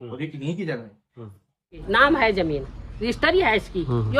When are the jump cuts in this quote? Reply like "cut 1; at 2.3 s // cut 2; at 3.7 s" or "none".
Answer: cut 1; at 1.8 s